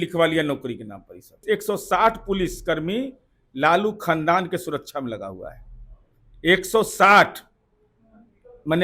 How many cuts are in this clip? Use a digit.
1